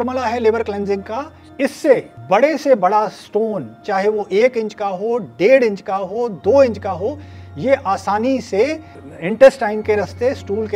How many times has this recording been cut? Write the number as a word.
zero